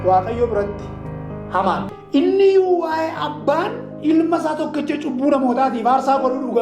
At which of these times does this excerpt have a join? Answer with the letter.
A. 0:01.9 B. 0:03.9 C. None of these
A